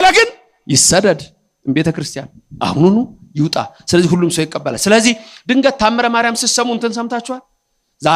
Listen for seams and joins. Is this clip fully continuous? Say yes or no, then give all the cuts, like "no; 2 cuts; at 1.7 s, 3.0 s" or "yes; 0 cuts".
yes; 0 cuts